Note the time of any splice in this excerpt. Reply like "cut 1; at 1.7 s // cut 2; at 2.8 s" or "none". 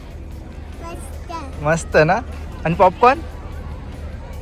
none